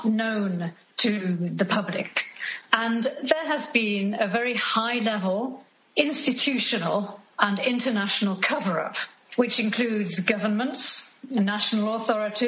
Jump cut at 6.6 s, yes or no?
no